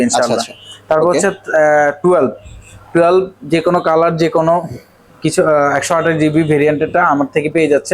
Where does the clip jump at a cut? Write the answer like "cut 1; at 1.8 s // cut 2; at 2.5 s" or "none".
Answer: none